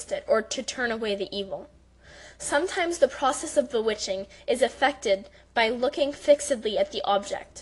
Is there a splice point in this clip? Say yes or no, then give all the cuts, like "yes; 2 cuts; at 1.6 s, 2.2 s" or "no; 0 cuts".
no; 0 cuts